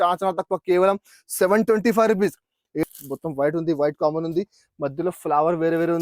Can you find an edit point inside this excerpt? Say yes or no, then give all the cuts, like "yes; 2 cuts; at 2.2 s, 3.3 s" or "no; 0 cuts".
yes; 1 cut; at 2.8 s